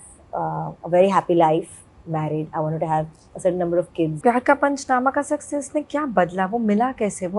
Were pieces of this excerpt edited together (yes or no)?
yes